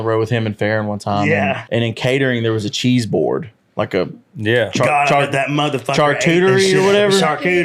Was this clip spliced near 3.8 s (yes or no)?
no